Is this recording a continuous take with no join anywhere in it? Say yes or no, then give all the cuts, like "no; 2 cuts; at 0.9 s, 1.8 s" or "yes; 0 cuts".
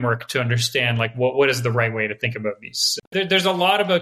no; 1 cut; at 3.1 s